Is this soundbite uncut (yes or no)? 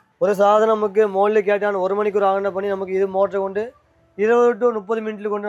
yes